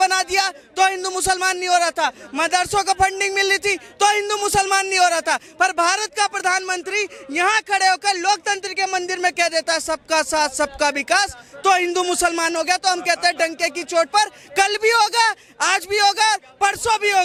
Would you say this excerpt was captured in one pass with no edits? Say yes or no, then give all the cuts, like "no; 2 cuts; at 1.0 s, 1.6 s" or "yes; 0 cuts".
yes; 0 cuts